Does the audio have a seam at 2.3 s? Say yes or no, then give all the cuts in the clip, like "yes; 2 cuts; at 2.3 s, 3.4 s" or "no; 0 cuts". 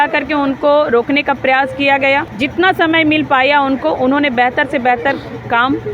yes; 1 cut; at 2.3 s